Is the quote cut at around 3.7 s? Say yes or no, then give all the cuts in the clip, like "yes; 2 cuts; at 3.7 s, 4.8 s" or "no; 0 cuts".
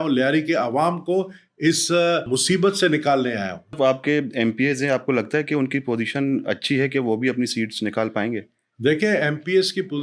yes; 2 cuts; at 2.3 s, 3.7 s